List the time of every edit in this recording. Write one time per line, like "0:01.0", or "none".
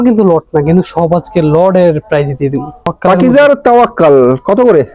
0:02.9